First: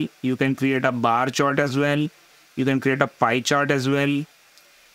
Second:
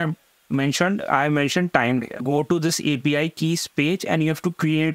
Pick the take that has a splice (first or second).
second